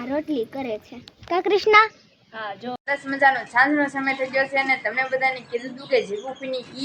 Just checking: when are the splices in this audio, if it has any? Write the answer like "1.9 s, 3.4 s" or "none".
2.7 s